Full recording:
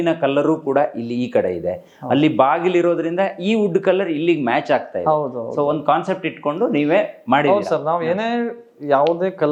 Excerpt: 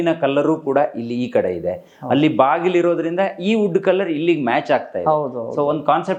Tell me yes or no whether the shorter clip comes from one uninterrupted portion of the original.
yes